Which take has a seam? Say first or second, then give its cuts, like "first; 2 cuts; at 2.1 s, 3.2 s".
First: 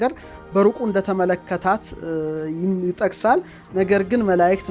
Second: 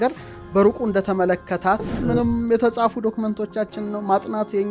second; 1 cut; at 2.0 s